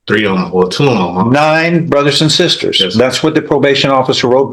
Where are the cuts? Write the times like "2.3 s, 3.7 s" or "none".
none